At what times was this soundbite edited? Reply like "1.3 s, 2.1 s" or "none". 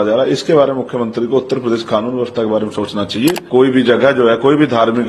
3.4 s